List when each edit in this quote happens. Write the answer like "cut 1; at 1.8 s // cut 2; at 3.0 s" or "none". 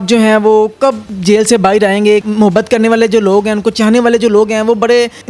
cut 1; at 1.1 s // cut 2; at 2.3 s